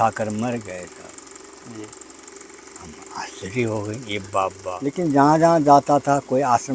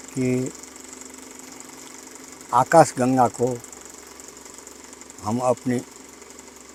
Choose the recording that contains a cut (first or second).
first